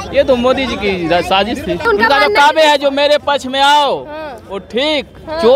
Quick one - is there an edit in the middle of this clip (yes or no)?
yes